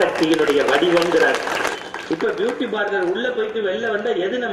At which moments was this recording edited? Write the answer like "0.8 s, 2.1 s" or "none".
1.8 s